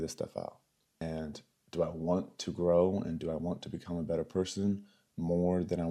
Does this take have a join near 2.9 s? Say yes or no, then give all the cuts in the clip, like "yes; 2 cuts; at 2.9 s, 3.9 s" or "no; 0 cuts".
no; 1 cut; at 1.0 s